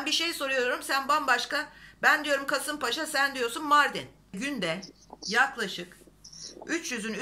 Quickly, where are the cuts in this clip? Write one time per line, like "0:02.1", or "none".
0:04.3